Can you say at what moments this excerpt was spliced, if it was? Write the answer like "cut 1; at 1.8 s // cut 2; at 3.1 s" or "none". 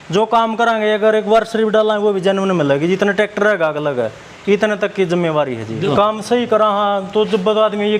cut 1; at 5.9 s